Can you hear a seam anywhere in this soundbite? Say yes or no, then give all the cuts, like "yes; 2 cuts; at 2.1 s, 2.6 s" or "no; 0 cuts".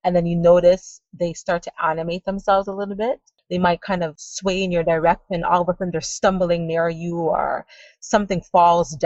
yes; 2 cuts; at 3.4 s, 4.2 s